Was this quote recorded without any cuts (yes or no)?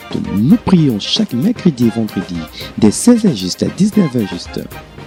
yes